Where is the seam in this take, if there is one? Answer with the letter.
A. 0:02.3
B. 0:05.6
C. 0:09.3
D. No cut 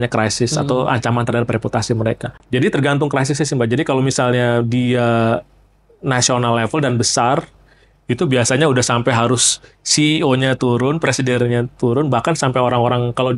A